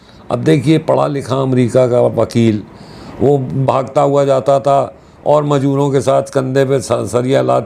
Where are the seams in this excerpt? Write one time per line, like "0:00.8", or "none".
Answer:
none

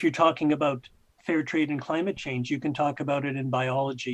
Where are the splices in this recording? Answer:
none

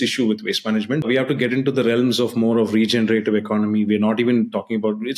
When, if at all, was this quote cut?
0:01.1

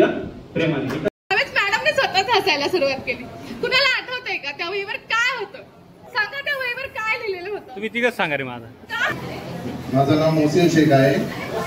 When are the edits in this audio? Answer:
0:01.1
0:05.9
0:09.1

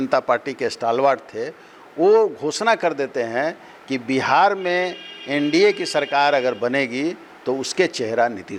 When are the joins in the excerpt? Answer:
none

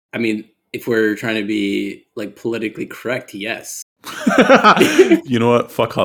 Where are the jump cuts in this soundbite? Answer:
0:05.1

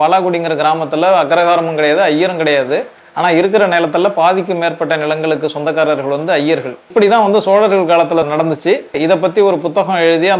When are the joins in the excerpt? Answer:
0:06.9
0:08.6

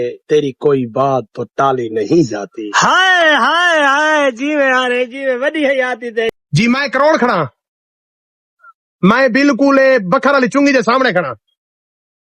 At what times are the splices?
0:06.3

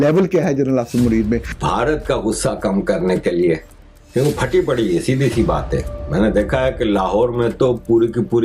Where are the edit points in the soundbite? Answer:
0:01.5

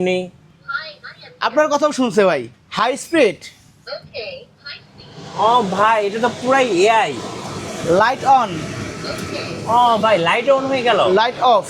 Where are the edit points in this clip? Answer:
0:02.5

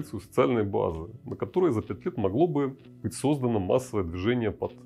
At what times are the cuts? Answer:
none

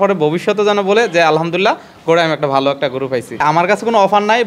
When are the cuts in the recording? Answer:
0:03.4

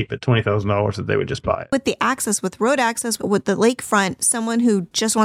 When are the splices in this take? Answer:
0:01.7
0:03.2

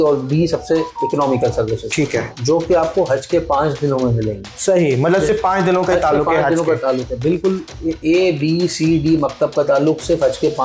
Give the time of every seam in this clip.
0:02.3

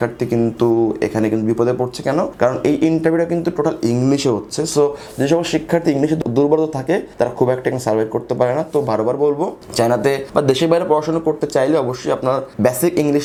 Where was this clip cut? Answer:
none

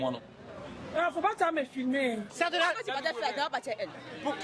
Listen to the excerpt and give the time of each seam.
0:02.3

